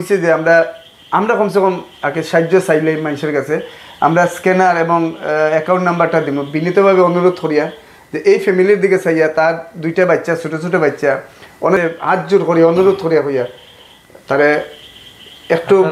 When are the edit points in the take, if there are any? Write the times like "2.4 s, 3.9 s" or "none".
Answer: 11.8 s